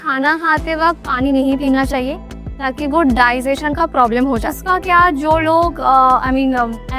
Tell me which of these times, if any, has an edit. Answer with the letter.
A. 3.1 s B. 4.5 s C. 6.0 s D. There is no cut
B